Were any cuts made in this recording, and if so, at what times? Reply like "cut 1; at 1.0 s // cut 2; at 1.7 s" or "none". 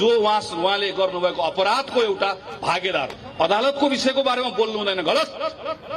cut 1; at 3.2 s